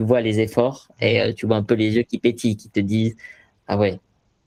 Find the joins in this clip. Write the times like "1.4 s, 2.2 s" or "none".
none

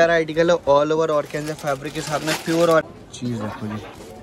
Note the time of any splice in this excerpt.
2.9 s

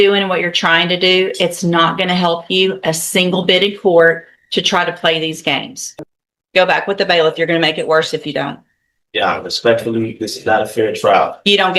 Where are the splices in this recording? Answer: 5.8 s

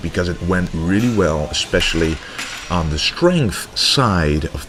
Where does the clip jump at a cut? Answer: none

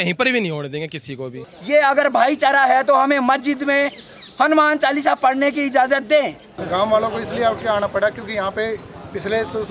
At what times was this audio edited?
1.4 s, 6.5 s

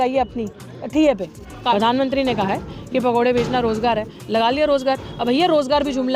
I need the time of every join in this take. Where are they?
1.7 s

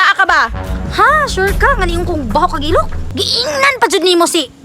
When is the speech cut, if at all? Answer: 3.0 s

